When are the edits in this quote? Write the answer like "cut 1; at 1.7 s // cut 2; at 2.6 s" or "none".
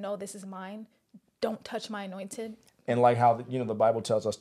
cut 1; at 2.7 s